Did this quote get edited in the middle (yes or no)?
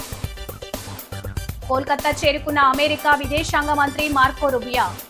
no